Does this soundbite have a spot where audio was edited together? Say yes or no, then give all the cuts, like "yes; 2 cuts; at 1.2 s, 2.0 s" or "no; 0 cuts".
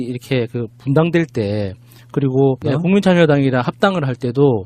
yes; 1 cut; at 3.4 s